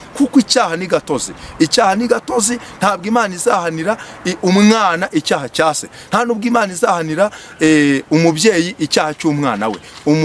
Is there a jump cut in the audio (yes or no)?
no